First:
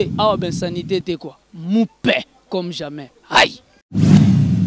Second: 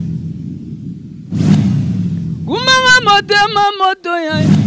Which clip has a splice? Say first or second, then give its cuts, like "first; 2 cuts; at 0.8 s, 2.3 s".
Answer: second; 1 cut; at 1.1 s